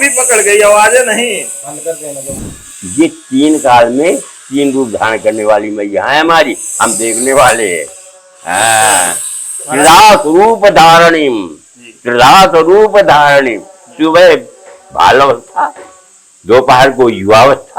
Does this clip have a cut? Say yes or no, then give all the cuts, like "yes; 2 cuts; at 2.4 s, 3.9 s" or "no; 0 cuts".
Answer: yes; 1 cut; at 2.4 s